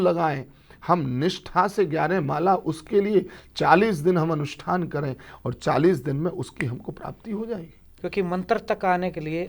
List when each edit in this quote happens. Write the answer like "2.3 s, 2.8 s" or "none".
7.9 s